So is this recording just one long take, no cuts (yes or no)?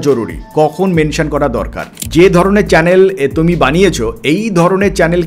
no